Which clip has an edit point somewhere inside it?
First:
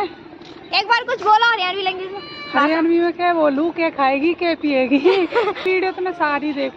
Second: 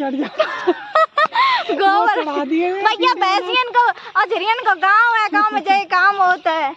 first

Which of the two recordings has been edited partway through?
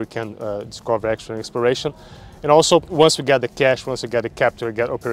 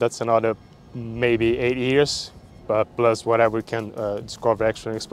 first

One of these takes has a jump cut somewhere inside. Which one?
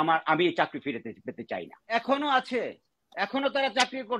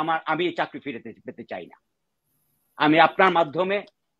first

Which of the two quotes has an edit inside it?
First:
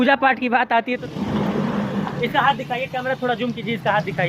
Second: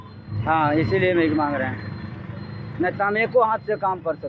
first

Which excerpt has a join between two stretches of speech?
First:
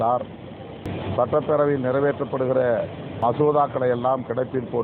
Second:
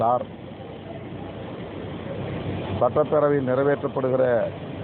first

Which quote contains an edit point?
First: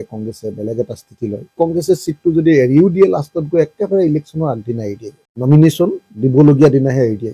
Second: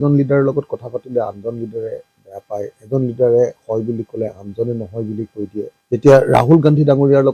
first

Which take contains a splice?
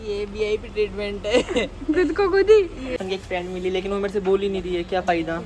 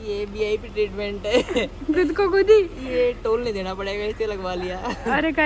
first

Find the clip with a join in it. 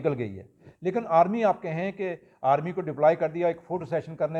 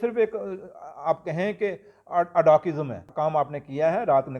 second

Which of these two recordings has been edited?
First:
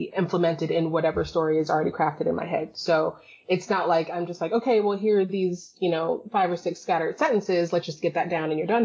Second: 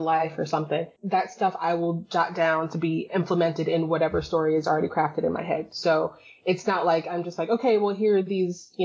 second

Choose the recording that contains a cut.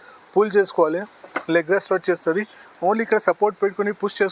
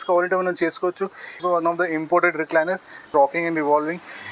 second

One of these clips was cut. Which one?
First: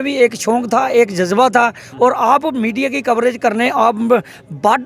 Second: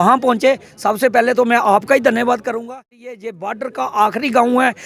second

